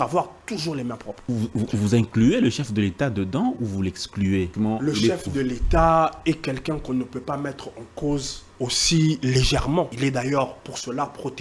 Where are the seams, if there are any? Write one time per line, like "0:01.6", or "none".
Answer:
0:01.1
0:04.5
0:08.4
0:09.9